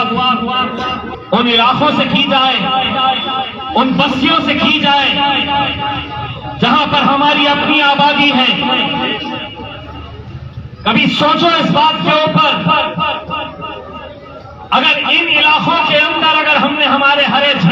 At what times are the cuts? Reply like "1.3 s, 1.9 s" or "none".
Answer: 1.1 s